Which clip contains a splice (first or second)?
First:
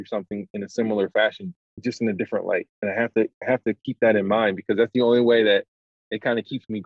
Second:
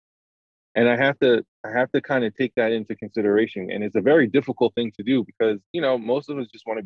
first